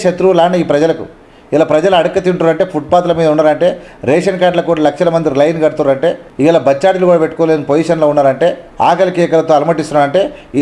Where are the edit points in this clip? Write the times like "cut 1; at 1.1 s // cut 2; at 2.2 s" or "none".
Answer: cut 1; at 6.3 s // cut 2; at 8.6 s